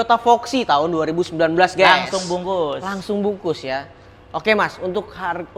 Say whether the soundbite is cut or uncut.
uncut